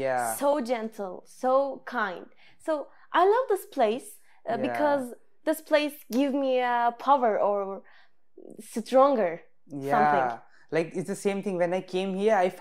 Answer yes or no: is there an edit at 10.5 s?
no